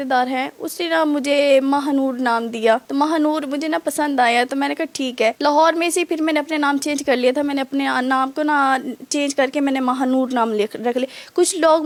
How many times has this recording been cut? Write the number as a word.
zero